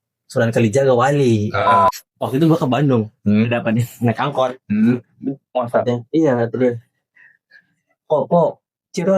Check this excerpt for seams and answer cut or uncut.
cut